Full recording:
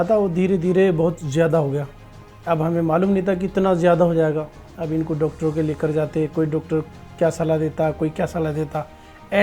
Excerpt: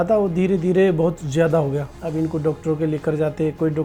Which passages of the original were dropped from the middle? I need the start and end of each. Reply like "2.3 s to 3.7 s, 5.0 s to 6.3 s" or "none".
1.9 s to 4.7 s